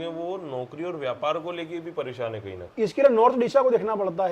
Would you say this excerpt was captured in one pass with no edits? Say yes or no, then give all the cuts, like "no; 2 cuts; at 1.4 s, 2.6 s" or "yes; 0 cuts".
no; 1 cut; at 2.6 s